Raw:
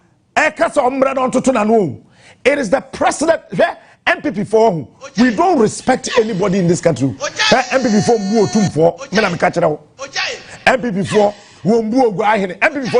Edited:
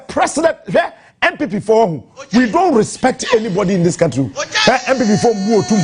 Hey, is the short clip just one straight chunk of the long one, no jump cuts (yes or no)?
yes